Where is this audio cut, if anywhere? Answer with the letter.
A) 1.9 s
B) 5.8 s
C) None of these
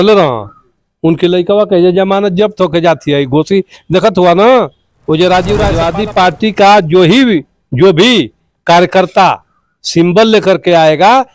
B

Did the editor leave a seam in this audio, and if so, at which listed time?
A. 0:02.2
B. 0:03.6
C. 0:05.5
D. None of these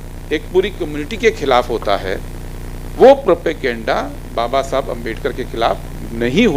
D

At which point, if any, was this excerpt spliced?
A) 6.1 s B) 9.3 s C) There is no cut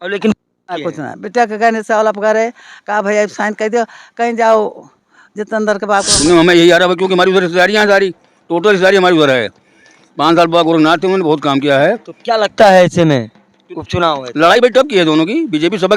A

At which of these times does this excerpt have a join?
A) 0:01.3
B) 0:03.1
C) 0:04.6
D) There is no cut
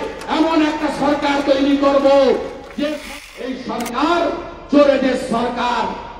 B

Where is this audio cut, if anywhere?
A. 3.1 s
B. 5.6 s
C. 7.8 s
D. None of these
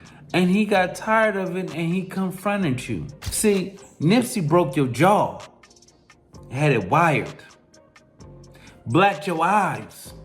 A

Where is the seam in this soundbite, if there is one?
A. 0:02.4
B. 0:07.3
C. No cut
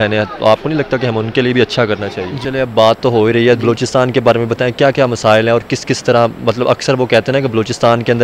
A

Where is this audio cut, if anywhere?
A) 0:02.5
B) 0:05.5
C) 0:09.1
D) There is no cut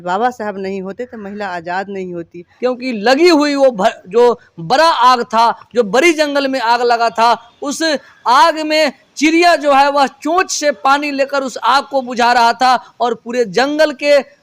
A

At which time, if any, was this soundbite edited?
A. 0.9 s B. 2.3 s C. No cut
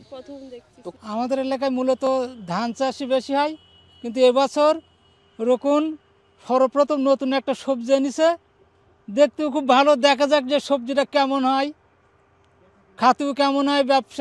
A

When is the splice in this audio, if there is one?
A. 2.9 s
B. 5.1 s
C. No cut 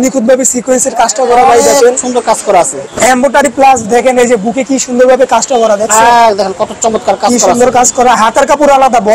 A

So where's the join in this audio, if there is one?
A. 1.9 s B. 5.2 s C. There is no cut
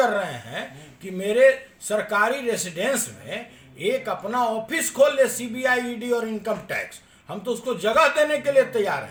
C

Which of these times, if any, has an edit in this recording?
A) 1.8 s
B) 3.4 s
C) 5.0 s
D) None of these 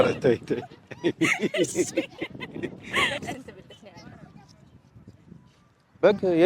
B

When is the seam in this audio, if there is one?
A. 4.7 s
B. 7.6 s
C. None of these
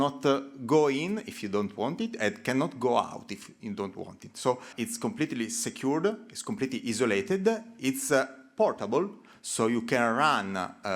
A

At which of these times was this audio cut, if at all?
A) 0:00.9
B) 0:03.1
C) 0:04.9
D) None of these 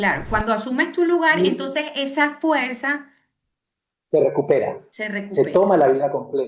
D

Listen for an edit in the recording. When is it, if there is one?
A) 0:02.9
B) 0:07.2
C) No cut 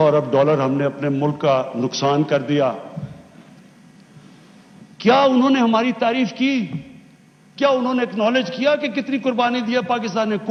C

